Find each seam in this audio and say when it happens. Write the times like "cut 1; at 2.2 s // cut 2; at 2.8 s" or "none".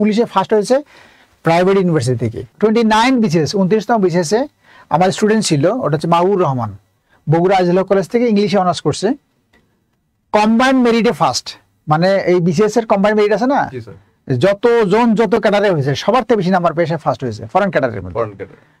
cut 1; at 2.5 s